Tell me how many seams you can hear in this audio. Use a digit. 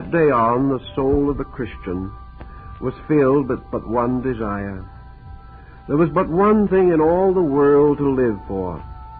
1